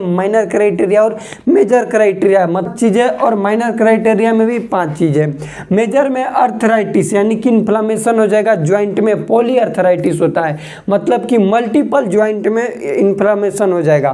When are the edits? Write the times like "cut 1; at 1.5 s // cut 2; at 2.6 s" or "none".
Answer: cut 1; at 2.7 s